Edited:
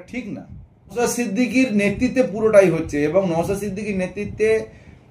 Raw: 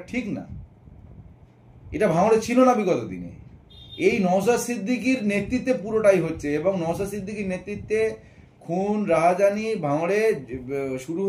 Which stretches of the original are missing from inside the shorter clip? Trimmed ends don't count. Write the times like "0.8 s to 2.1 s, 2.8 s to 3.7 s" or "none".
1.0 s to 4.5 s